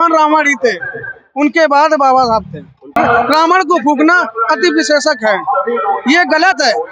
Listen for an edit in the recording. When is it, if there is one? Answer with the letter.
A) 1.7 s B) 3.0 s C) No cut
B